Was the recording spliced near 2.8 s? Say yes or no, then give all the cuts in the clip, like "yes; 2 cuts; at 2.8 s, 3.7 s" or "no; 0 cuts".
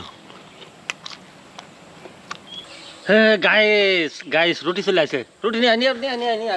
yes; 1 cut; at 2.8 s